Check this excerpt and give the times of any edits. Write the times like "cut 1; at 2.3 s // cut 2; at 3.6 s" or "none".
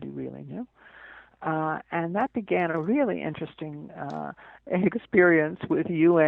none